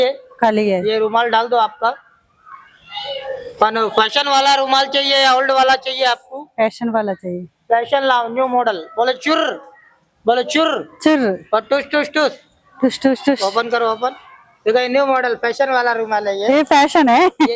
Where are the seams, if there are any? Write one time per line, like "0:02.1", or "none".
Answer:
none